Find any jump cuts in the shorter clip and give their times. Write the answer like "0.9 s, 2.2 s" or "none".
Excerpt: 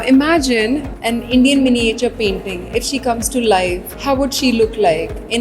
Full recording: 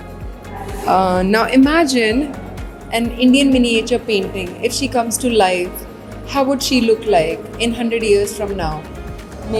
0.9 s, 3.9 s